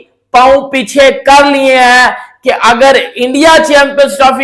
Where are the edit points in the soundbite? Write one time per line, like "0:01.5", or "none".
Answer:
none